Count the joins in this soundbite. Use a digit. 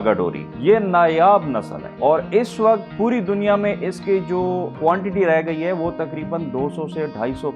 0